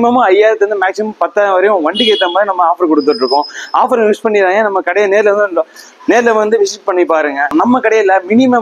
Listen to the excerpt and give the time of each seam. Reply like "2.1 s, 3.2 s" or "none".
7.5 s